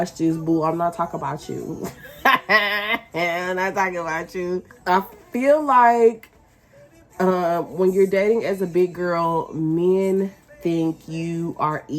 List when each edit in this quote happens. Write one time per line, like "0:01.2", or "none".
none